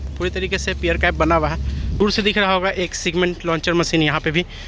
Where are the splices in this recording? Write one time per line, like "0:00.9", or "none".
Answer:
0:02.0